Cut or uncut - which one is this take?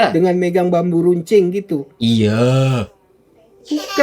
uncut